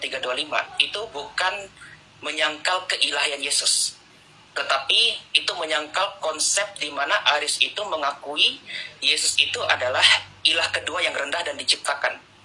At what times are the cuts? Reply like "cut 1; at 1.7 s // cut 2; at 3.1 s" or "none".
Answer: none